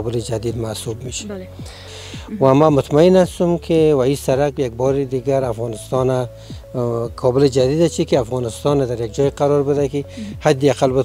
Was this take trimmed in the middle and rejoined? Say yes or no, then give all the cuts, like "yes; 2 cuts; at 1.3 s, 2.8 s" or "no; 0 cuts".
yes; 1 cut; at 1.9 s